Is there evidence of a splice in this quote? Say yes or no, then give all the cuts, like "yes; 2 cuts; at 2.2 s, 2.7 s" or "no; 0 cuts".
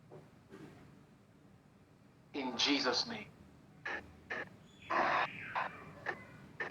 no; 0 cuts